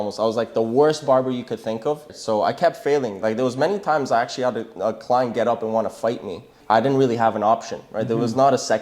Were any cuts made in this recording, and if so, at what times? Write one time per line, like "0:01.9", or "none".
0:02.1
0:06.5